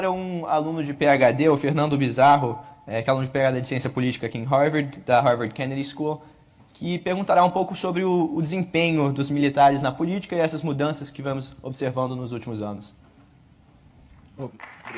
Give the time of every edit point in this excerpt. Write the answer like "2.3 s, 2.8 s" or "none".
none